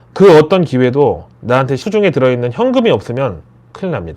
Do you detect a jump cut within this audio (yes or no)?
yes